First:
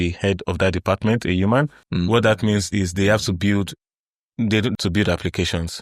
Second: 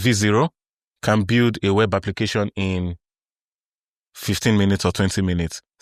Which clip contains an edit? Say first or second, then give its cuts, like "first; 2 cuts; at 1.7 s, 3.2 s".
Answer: first; 2 cuts; at 1.8 s, 4.7 s